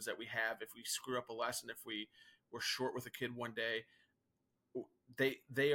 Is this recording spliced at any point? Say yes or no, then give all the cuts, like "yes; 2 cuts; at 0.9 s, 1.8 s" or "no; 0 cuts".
no; 0 cuts